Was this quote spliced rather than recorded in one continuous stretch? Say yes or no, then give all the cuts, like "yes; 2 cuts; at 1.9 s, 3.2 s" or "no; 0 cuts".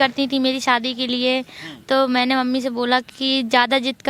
no; 0 cuts